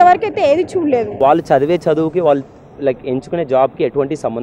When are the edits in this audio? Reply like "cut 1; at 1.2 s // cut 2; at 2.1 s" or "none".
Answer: cut 1; at 1.2 s